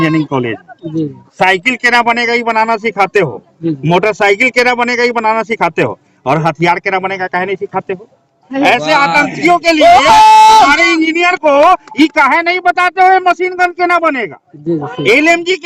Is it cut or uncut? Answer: cut